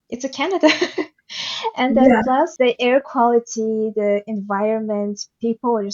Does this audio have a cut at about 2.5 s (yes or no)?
yes